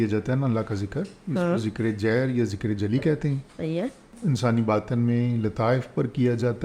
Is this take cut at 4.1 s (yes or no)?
yes